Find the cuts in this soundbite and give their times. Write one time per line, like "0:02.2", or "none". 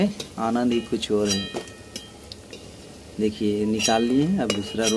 none